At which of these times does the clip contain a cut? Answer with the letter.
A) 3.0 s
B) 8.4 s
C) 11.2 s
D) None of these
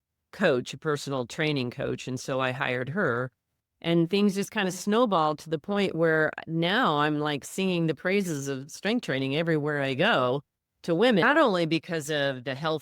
C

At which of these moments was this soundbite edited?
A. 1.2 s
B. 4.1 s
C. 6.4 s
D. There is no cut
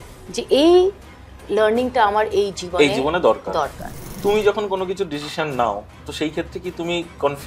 B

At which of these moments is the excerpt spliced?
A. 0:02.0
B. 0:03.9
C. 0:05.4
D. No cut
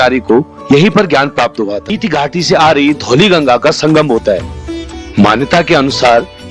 A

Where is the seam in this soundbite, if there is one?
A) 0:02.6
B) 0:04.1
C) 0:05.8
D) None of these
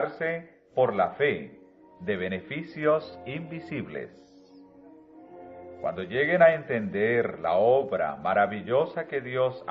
B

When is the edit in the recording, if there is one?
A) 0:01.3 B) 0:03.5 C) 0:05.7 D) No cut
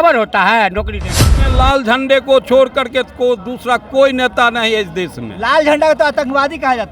A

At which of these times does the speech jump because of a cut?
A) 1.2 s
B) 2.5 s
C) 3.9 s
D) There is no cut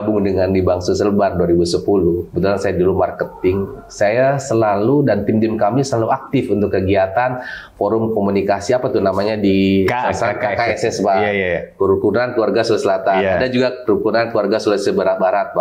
D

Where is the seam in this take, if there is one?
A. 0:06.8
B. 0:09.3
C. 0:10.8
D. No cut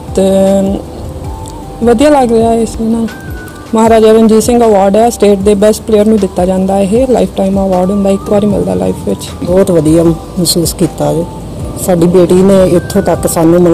B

